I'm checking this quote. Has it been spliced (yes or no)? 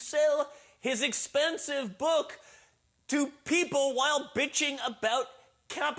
no